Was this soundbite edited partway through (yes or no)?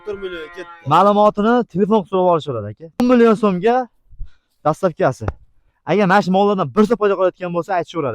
yes